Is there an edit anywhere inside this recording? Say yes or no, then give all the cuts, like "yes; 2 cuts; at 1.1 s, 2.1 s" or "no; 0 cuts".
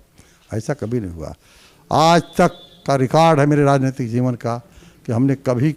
no; 0 cuts